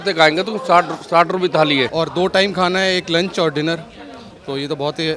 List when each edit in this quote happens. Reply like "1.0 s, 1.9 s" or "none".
1.9 s